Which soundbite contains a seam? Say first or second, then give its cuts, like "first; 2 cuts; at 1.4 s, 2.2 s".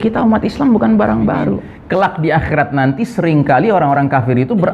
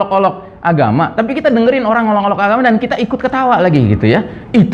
first; 1 cut; at 1.7 s